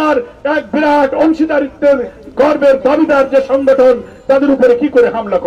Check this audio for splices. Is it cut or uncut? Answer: uncut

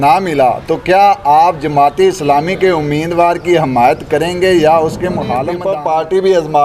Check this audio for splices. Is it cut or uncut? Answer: cut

